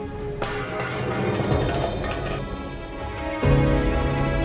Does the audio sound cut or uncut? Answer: cut